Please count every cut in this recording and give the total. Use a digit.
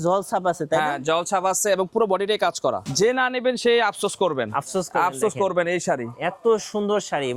1